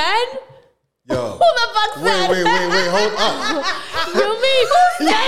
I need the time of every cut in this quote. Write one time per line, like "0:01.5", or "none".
none